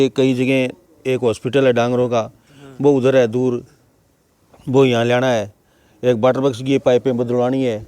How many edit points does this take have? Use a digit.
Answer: 0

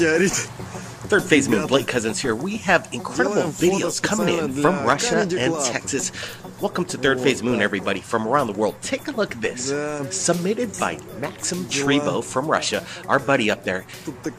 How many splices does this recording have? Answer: 1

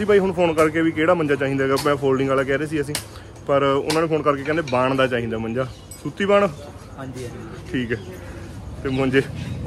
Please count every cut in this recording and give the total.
0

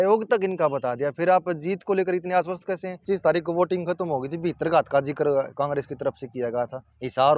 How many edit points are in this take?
1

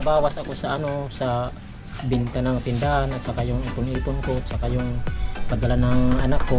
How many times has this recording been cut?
0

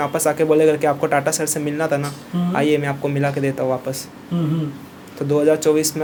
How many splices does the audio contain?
0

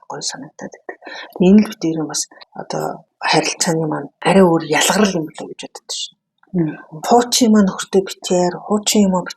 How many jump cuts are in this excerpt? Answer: 2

